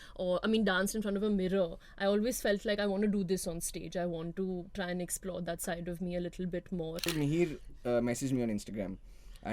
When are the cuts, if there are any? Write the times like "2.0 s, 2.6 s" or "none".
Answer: 7.0 s

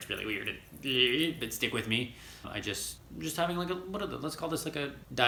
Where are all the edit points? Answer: none

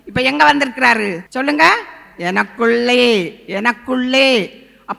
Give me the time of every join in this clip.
1.2 s

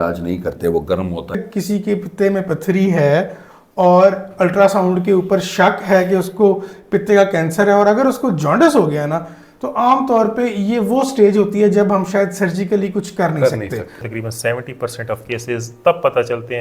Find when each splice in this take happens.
1.4 s, 14.1 s

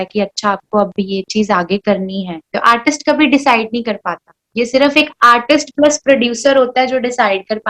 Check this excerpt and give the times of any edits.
2.4 s

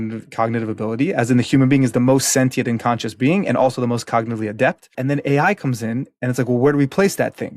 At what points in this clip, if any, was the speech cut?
4.9 s

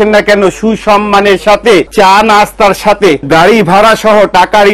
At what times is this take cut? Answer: 1.9 s, 3.2 s

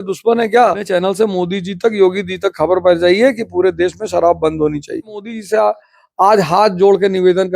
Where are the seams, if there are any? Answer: 0.8 s, 5.4 s

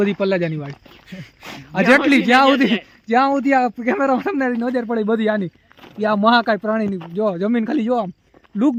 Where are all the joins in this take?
none

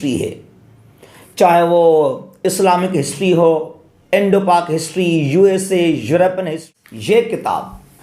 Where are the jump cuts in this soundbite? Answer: 6.6 s

